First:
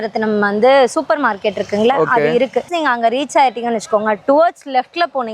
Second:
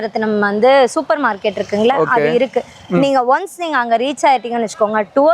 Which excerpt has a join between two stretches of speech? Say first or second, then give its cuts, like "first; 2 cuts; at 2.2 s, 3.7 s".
first; 1 cut; at 2.7 s